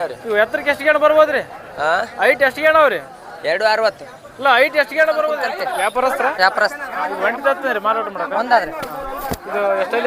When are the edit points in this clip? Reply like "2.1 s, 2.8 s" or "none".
5.6 s